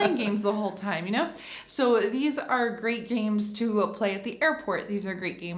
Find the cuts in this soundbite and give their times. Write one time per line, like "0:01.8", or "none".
none